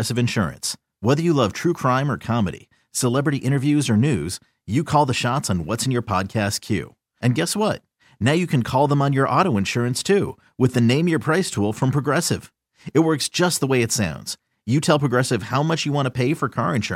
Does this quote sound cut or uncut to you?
uncut